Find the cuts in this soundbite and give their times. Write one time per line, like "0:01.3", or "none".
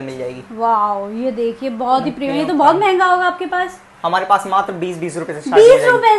none